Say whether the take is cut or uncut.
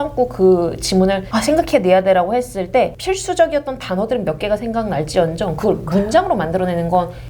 cut